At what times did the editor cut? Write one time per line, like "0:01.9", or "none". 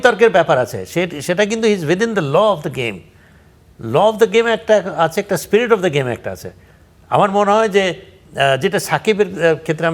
none